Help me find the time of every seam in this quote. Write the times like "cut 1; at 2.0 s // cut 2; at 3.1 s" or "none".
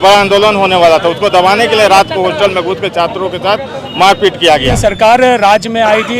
cut 1; at 4.7 s